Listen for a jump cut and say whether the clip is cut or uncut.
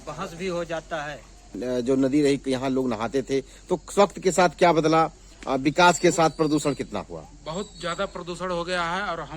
cut